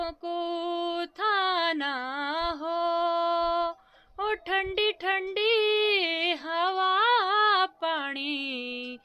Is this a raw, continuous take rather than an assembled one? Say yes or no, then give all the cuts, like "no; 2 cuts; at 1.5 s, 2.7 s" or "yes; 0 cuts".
yes; 0 cuts